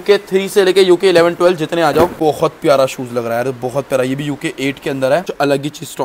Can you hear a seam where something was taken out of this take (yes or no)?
yes